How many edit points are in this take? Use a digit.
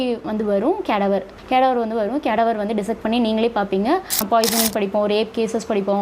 2